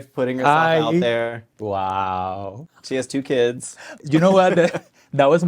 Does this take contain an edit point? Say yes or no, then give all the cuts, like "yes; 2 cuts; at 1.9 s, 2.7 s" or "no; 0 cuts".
yes; 3 cuts; at 1.5 s, 2.6 s, 4.0 s